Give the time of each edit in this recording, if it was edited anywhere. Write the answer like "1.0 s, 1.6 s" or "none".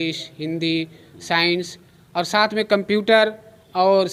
none